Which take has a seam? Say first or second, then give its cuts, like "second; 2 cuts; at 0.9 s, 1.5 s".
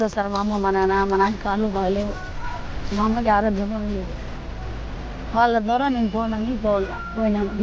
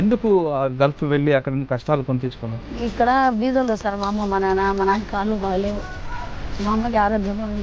second; 1 cut; at 2.7 s